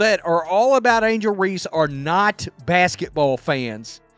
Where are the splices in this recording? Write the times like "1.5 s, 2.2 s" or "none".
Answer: none